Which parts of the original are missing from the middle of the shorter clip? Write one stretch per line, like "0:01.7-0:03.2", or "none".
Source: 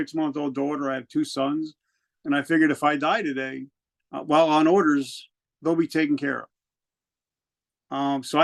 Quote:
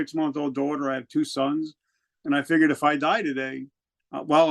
none